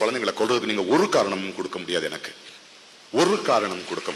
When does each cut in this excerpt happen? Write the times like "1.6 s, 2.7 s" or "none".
none